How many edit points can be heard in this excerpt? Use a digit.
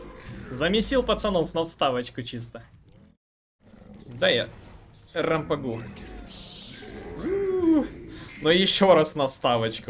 1